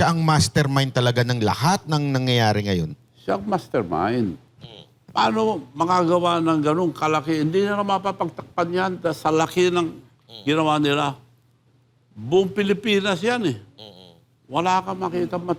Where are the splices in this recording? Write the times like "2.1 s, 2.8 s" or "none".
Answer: none